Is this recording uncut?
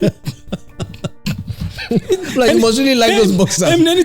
no; 1 cut; at 2.1 s

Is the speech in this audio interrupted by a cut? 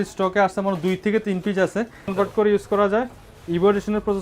yes; 1 cut; at 2.1 s

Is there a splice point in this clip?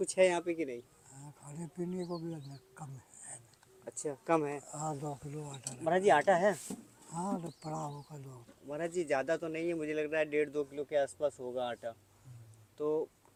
no; 0 cuts

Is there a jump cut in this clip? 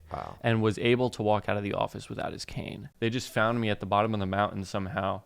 yes; 1 cut; at 2.8 s

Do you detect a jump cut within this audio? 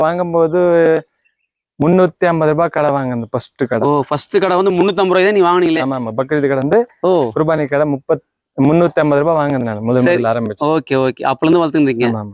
no; 0 cuts

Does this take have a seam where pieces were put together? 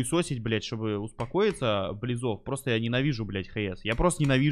no; 0 cuts

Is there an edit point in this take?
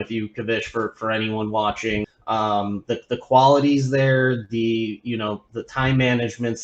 yes; 1 cut; at 2.1 s

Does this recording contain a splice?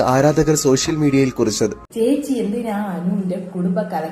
yes; 1 cut; at 1.8 s

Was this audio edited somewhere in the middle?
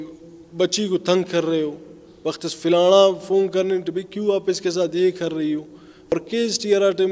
yes; 1 cut; at 6.1 s

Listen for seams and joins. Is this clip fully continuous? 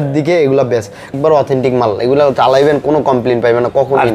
no; 1 cut; at 1.1 s

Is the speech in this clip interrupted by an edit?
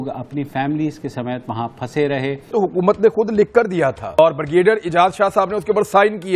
yes; 1 cut; at 2.5 s

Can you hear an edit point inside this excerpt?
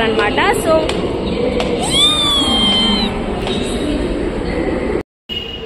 no; 0 cuts

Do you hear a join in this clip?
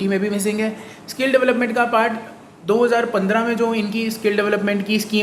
no; 0 cuts

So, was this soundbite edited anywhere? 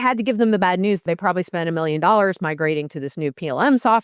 yes; 1 cut; at 1.0 s

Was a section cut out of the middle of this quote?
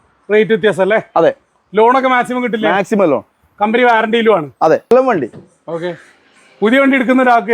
yes; 1 cut; at 4.9 s

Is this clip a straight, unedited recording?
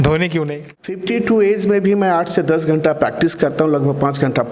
no; 1 cut; at 1.0 s

